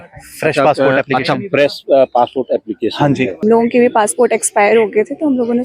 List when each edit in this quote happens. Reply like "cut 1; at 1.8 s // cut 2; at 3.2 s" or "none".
cut 1; at 3.4 s